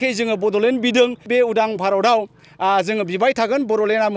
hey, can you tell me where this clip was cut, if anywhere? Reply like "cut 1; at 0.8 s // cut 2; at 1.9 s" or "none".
cut 1; at 1.3 s